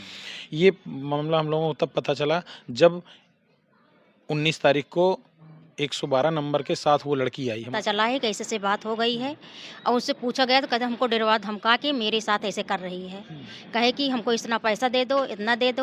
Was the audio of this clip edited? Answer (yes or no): yes